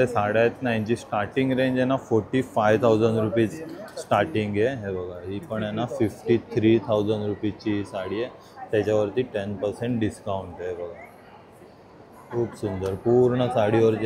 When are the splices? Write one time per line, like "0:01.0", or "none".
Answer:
none